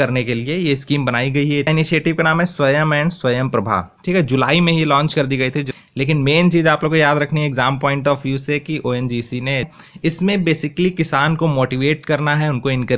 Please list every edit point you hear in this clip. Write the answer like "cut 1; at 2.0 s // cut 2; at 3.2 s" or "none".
cut 1; at 1.7 s // cut 2; at 5.7 s // cut 3; at 9.8 s